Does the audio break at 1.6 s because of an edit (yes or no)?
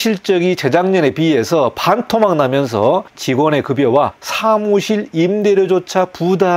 no